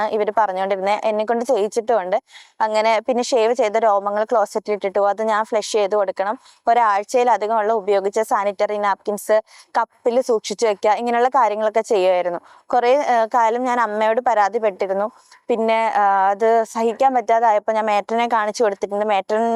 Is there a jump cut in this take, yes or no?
no